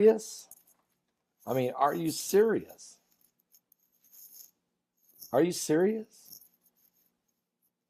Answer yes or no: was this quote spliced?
yes